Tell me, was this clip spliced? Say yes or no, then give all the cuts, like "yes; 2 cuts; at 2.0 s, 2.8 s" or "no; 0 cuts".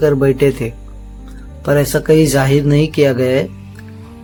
no; 0 cuts